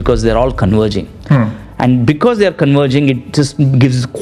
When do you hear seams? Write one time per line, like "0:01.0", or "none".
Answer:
none

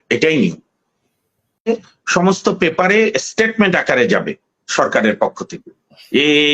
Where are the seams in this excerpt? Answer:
0:01.7

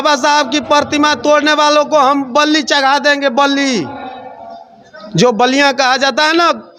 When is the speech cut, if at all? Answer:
none

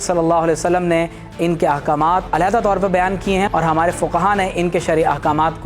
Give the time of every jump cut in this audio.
0:02.3

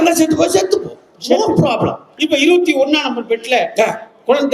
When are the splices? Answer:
0:02.1

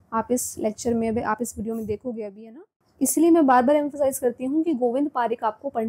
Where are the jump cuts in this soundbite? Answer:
0:02.8

